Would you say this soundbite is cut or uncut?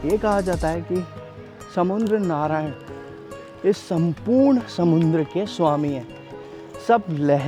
uncut